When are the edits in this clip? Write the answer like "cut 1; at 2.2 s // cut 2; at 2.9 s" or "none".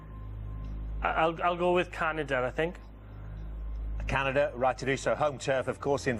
cut 1; at 2.5 s